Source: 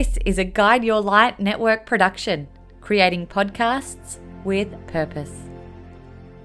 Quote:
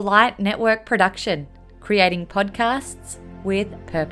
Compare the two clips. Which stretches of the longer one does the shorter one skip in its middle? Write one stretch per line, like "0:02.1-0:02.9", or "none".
none